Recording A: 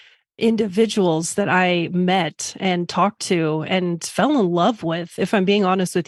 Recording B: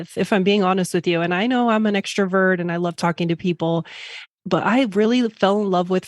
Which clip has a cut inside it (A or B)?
B